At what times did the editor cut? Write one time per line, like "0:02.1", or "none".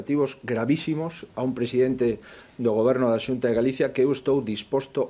none